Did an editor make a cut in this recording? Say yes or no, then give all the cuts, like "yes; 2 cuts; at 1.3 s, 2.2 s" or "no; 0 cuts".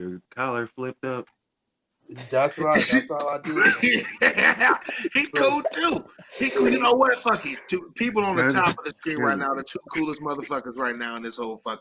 no; 0 cuts